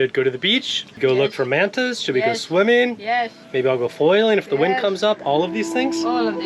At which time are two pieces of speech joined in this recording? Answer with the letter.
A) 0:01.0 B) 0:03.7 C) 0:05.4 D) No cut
A